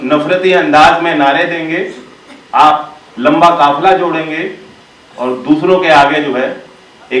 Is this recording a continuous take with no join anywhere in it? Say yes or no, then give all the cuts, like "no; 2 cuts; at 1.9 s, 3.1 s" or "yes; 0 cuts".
yes; 0 cuts